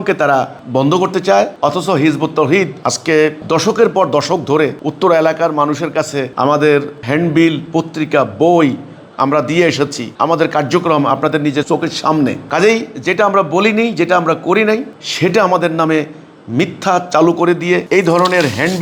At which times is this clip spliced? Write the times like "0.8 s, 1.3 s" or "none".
2.8 s, 4.8 s, 10.0 s